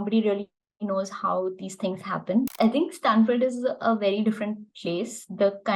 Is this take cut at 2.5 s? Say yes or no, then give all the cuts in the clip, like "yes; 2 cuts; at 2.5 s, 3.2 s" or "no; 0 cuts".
yes; 1 cut; at 2.5 s